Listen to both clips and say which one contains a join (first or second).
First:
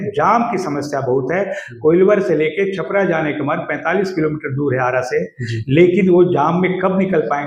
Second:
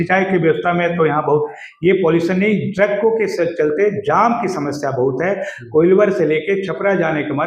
second